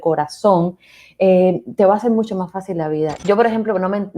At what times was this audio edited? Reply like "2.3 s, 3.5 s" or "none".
3.2 s